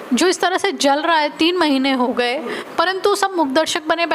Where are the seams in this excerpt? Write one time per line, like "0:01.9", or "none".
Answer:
0:02.6